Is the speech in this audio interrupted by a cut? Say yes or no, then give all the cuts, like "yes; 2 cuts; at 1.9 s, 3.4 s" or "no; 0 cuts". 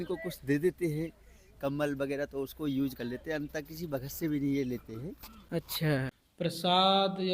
yes; 1 cut; at 6.2 s